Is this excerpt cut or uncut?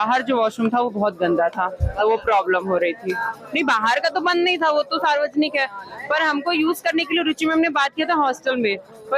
uncut